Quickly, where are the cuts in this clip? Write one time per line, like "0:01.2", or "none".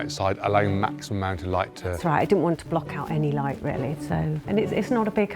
0:04.4